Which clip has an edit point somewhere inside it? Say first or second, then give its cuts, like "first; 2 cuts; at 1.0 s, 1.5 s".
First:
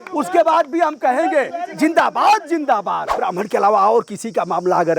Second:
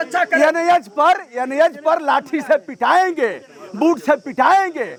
first; 1 cut; at 3.2 s